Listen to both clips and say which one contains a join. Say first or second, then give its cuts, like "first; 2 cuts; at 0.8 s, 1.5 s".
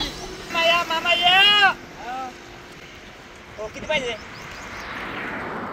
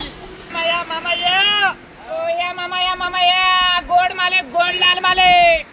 second; 1 cut; at 1.9 s